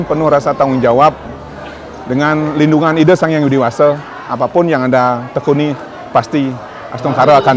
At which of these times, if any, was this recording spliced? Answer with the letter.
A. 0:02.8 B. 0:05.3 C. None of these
C